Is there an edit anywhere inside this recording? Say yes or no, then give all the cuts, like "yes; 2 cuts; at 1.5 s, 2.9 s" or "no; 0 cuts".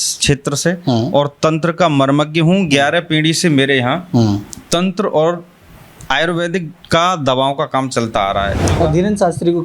yes; 1 cut; at 8.6 s